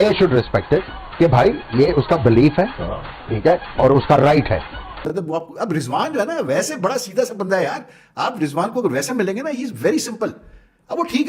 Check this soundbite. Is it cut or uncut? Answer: cut